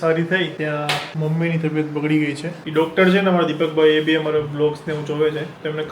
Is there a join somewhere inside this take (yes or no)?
yes